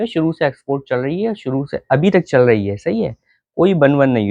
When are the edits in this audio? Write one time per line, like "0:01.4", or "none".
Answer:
none